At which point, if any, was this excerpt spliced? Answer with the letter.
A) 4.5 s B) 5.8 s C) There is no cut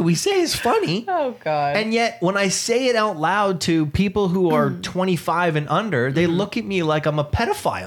C